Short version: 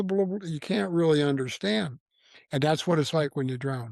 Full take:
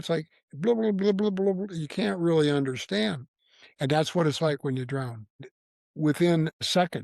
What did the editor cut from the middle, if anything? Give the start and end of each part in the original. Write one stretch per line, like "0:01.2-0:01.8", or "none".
none